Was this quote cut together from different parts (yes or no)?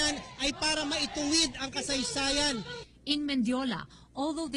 no